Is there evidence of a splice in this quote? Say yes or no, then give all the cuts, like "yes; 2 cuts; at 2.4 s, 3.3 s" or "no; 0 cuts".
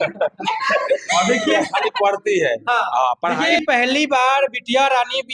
yes; 1 cut; at 3.6 s